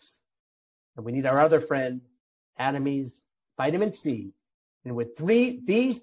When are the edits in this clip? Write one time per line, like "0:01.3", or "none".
none